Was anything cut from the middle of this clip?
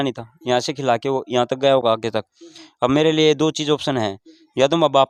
no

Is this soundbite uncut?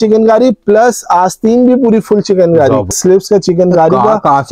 no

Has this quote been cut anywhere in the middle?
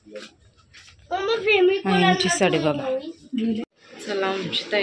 yes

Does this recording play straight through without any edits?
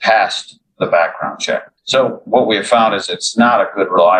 no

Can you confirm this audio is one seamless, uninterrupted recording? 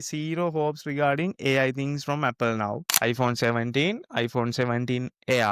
no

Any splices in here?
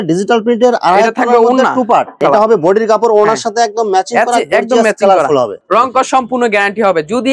yes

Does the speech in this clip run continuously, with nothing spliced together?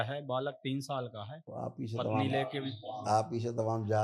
yes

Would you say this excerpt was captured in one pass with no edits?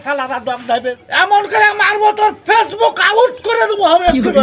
no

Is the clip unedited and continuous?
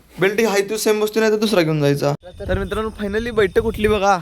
no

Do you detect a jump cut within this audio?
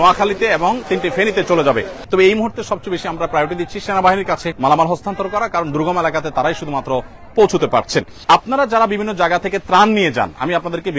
yes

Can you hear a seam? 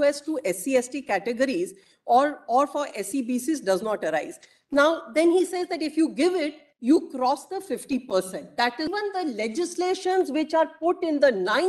yes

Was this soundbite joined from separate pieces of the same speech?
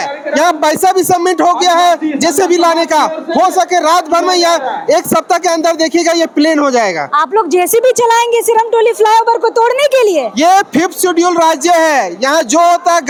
no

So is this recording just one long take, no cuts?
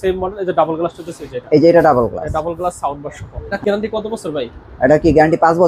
no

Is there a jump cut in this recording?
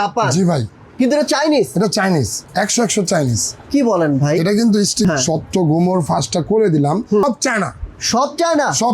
yes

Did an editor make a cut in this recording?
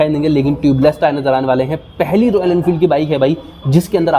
no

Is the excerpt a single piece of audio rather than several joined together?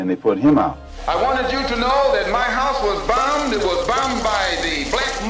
no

